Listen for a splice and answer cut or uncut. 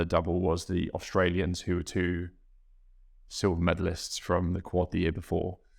uncut